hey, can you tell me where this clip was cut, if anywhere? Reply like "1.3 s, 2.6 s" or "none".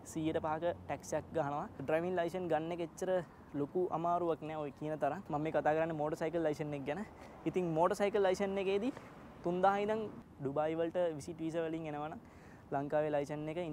1.8 s, 5.2 s, 10.2 s